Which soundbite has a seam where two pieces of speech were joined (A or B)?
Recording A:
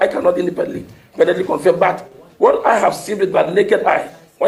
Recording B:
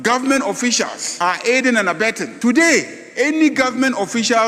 B